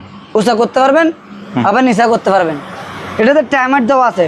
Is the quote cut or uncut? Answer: uncut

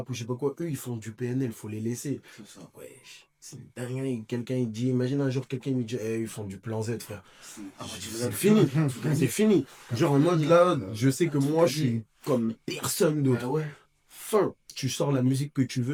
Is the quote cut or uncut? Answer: uncut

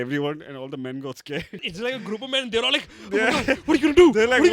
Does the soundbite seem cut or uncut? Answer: cut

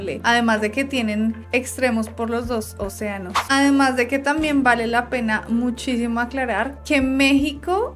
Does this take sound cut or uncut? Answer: cut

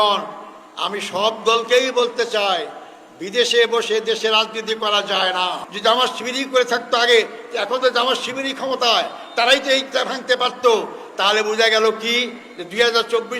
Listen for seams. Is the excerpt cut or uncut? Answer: cut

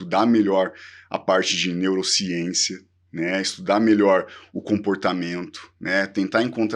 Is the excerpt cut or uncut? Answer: uncut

